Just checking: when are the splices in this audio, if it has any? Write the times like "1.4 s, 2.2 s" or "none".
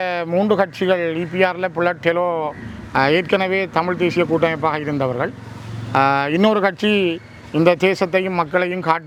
none